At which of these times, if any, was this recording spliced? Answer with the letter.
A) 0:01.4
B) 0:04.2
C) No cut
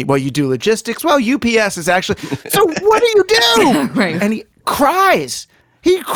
B